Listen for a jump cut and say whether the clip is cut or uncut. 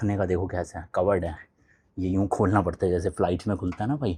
uncut